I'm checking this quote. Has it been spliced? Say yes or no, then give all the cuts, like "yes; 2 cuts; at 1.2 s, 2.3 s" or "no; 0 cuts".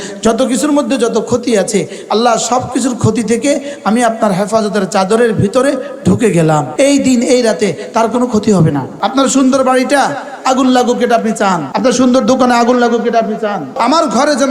yes; 4 cuts; at 6.7 s, 8.9 s, 11.7 s, 13.6 s